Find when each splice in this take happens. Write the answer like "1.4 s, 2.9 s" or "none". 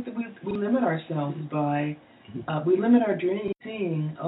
3.2 s